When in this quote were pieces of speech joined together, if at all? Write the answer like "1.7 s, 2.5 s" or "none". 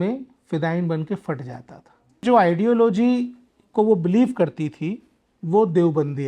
2.2 s